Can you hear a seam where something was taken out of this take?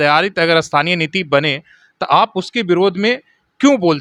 no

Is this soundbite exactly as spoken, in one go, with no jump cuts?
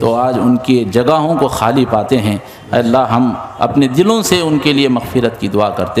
yes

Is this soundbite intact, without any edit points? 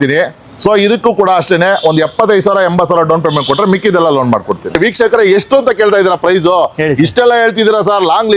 no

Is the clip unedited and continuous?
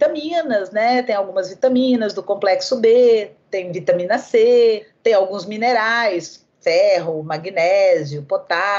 no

